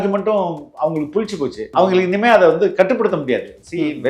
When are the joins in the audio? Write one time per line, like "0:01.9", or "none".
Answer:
0:01.6